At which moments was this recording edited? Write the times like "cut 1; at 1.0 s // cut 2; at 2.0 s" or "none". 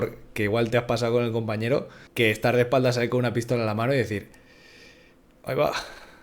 cut 1; at 2.0 s